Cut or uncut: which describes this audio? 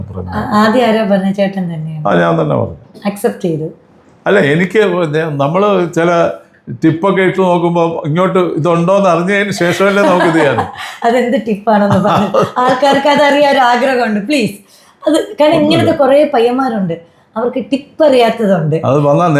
uncut